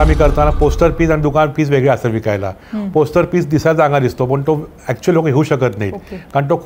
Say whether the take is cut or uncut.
uncut